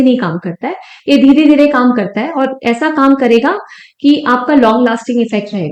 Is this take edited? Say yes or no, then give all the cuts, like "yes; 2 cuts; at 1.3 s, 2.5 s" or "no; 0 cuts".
no; 0 cuts